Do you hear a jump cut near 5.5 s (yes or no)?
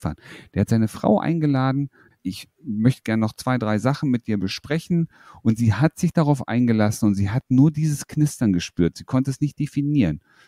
no